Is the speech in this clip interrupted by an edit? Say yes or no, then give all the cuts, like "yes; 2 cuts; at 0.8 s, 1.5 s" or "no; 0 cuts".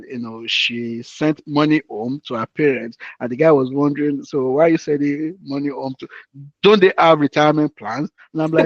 no; 0 cuts